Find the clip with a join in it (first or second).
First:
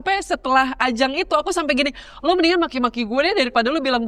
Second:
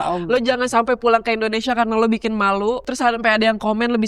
second